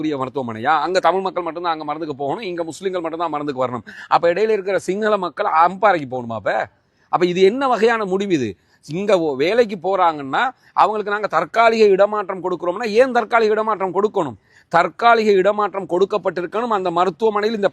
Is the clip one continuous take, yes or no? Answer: yes